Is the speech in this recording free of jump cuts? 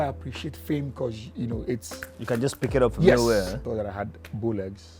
no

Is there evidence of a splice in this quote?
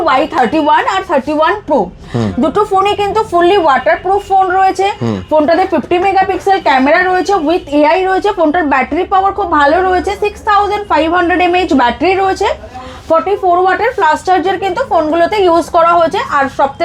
no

